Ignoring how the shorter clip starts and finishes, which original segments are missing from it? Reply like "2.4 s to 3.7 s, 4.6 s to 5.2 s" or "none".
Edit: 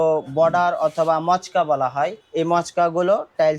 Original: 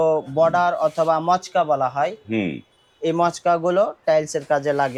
2.2 s to 2.9 s